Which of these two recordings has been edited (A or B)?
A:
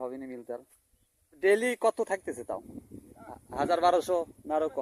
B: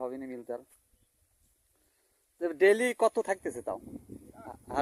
A